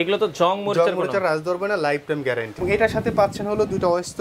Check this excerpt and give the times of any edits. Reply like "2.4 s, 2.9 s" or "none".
2.6 s